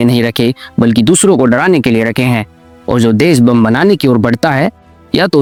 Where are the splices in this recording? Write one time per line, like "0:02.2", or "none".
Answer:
none